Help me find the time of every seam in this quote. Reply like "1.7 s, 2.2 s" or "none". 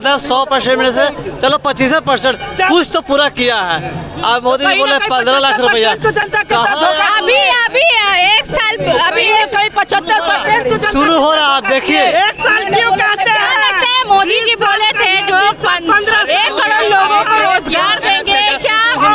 none